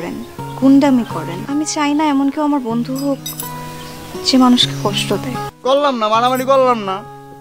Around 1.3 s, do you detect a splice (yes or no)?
yes